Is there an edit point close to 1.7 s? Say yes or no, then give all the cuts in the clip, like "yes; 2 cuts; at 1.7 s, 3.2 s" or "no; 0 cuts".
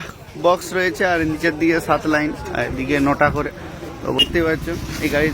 no; 1 cut; at 4.2 s